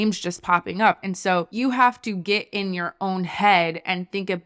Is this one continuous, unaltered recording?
no; 1 cut; at 1.0 s

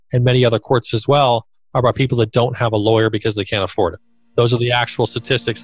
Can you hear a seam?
yes; 1 cut; at 4.2 s

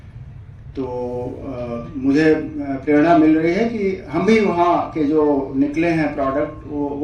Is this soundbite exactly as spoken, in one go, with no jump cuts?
yes; 0 cuts

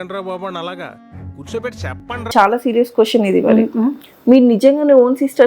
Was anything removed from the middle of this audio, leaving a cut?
yes; 1 cut; at 2.3 s

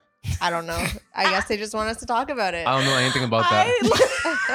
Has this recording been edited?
no; 0 cuts

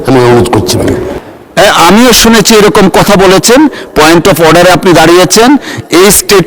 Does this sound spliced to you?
yes; 1 cut; at 1.2 s

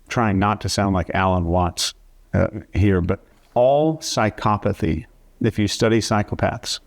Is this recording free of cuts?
no; 1 cut; at 3.3 s

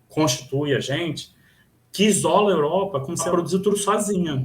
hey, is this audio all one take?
no; 1 cut; at 3.3 s

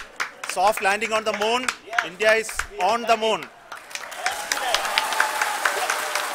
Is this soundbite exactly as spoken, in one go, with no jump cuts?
yes; 0 cuts

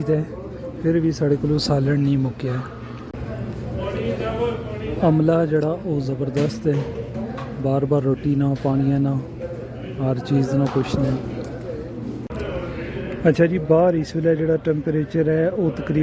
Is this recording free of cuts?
no; 2 cuts; at 3.1 s, 12.3 s

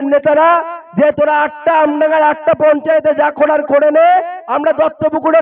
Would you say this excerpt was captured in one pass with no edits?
yes; 0 cuts

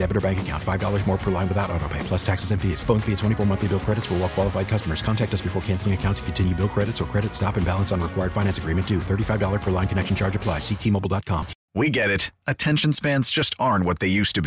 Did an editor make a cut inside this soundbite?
yes; 1 cut; at 11.6 s

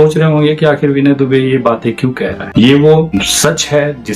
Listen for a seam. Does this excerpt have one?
yes; 2 cuts; at 2.4 s, 3.1 s

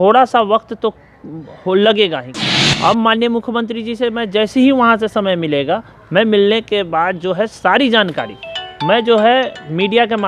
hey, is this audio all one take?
no; 1 cut; at 2.3 s

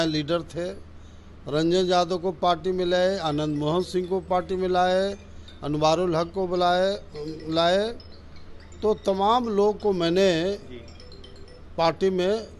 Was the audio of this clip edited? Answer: no; 0 cuts

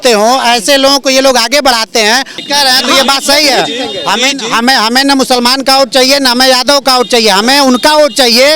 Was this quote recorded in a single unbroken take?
no; 1 cut; at 2.3 s

